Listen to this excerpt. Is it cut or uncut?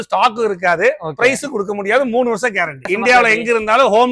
cut